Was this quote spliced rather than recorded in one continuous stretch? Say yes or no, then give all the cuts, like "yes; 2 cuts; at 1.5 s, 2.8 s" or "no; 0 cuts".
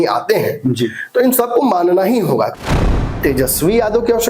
yes; 1 cut; at 2.7 s